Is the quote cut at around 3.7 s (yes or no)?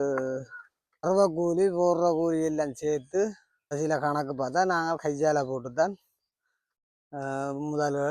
yes